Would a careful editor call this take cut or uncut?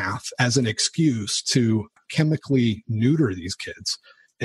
uncut